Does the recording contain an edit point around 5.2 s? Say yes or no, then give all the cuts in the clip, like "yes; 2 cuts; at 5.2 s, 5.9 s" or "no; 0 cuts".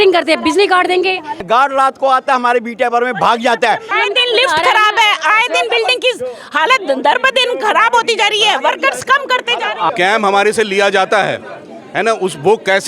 no; 3 cuts; at 1.4 s, 3.9 s, 9.9 s